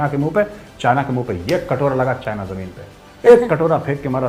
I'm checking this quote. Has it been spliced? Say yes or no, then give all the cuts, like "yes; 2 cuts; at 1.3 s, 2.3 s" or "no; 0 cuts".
no; 0 cuts